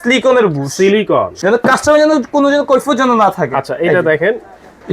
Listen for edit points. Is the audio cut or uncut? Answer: cut